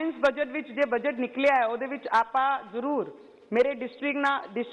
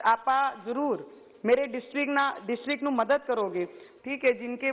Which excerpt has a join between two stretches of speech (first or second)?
second